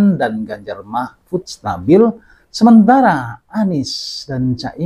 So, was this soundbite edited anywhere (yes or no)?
no